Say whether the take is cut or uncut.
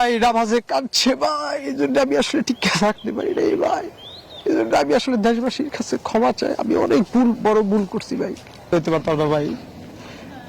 cut